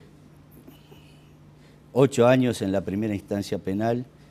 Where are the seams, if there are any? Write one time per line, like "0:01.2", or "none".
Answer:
none